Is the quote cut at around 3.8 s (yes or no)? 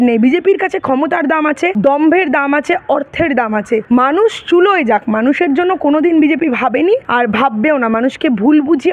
yes